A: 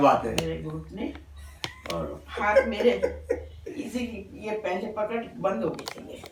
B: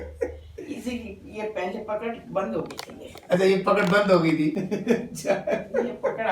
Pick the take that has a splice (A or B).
B